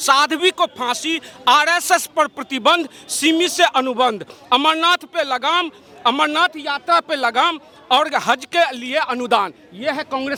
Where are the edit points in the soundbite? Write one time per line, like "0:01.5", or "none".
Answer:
none

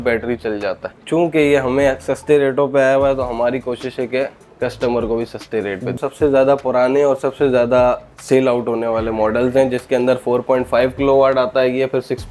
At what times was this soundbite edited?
0:01.0
0:06.0

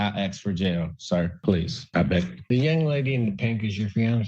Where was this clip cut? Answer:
0:01.3

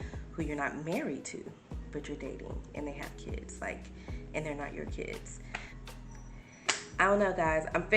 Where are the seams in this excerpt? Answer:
0:05.8

